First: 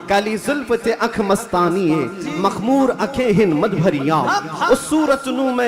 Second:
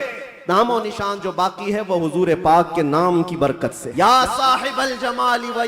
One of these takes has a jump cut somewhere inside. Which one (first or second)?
second